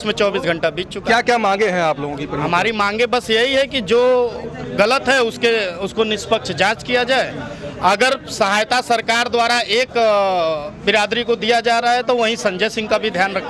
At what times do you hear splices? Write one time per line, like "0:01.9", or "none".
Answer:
none